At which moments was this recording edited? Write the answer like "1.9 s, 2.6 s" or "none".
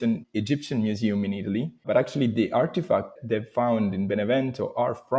none